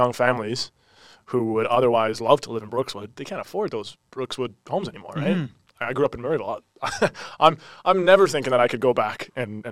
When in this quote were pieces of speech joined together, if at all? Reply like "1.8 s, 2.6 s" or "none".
none